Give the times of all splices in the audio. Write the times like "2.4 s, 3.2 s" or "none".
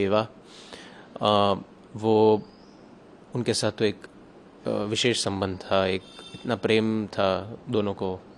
none